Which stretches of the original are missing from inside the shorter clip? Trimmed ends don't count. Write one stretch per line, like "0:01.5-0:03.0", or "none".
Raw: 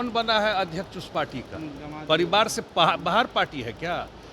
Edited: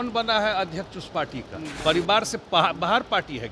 0:01.7-0:02.0